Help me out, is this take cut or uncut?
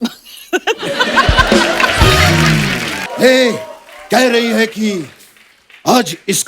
cut